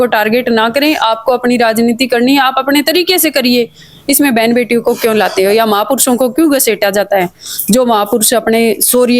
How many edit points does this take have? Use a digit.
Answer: 0